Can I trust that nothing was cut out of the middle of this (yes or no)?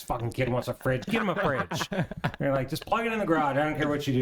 yes